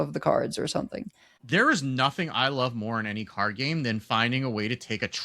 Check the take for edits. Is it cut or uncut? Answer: cut